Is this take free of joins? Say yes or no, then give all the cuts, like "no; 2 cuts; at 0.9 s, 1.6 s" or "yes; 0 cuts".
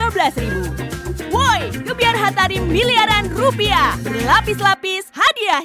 yes; 0 cuts